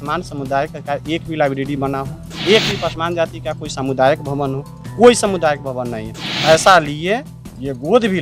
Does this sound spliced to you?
yes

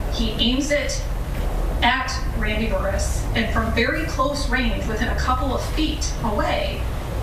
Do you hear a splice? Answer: no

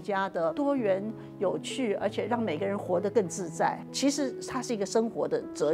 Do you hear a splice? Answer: no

